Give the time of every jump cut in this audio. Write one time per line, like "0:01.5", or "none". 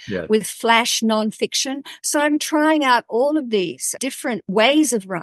0:04.1